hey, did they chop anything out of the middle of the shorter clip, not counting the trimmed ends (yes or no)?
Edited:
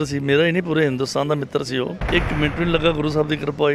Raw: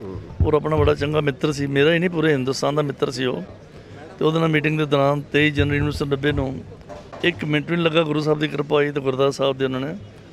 yes